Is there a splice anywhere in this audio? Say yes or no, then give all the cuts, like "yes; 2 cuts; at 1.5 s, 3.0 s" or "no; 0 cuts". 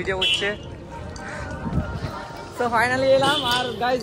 no; 0 cuts